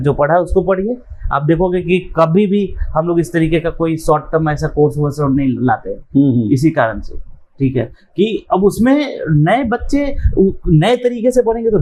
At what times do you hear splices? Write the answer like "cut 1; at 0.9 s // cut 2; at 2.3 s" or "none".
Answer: none